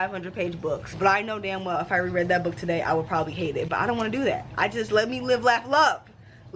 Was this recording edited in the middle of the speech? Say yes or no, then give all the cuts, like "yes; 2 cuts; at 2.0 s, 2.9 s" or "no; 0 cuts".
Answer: yes; 1 cut; at 1.0 s